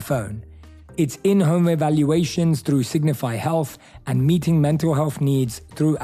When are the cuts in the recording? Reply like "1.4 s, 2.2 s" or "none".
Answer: none